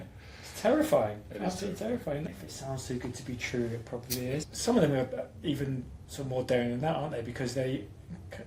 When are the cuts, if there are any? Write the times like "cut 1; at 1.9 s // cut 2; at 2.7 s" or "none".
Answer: cut 1; at 2.3 s // cut 2; at 4.4 s

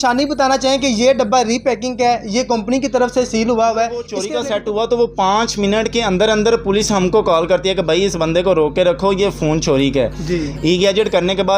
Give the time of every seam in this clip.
cut 1; at 4.2 s

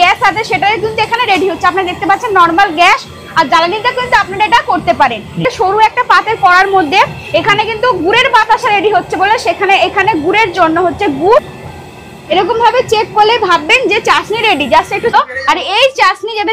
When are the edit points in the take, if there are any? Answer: cut 1; at 5.4 s // cut 2; at 11.4 s // cut 3; at 15.1 s

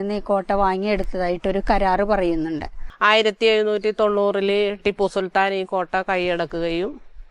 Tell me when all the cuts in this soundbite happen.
cut 1; at 2.8 s

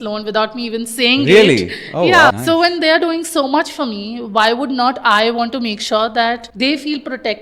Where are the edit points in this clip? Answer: cut 1; at 2.3 s // cut 2; at 6.5 s

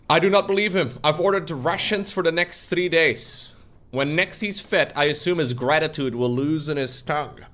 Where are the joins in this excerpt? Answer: cut 1; at 0.9 s

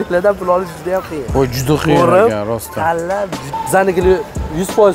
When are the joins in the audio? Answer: cut 1; at 3.4 s

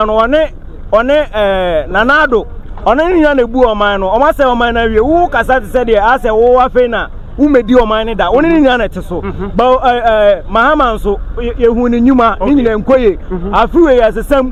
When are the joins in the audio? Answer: none

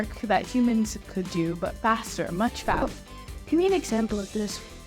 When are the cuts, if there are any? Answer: cut 1; at 2.8 s

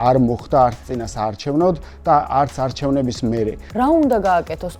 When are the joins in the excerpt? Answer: cut 1; at 3.6 s

